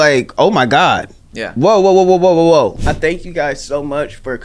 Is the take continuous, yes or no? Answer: no